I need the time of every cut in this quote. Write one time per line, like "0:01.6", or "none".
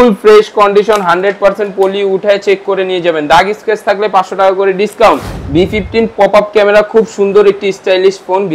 0:05.3

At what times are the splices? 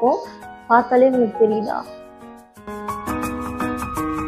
none

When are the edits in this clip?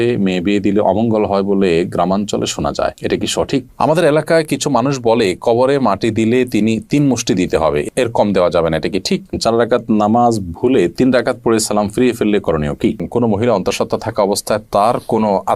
0:03.7
0:09.3
0:13.0

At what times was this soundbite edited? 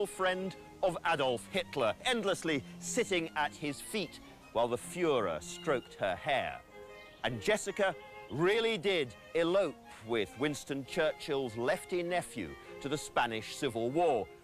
0:09.7

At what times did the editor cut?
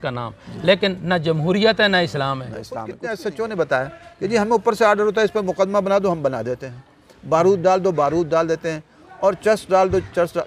0:02.9

